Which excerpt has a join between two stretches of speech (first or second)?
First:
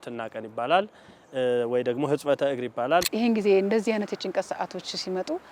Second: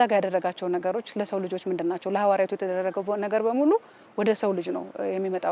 first